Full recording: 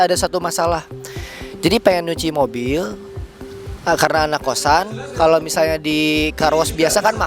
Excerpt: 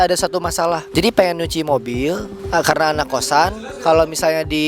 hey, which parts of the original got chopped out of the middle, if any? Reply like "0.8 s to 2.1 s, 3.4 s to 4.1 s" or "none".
0.8 s to 1.5 s, 3.0 s to 3.7 s